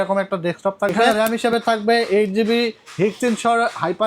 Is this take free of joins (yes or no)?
no